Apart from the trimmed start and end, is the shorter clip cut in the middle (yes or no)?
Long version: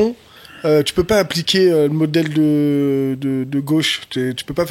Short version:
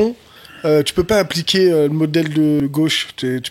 yes